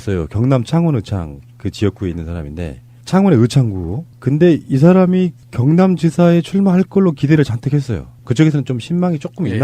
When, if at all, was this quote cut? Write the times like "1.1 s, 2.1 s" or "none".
none